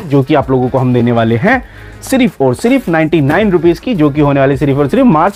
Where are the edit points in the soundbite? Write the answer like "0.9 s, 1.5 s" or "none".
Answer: none